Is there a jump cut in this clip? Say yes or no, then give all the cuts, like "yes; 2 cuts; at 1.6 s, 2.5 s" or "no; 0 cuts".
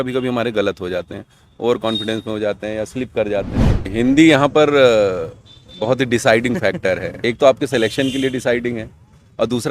yes; 2 cuts; at 3.9 s, 7.1 s